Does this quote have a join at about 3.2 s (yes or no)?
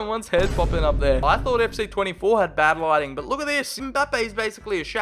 no